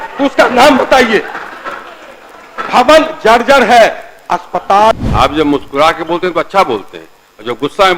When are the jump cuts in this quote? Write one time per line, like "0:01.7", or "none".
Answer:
0:04.9